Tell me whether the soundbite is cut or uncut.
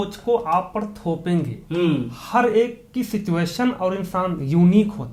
uncut